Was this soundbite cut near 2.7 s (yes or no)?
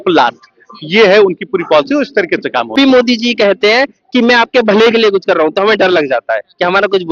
yes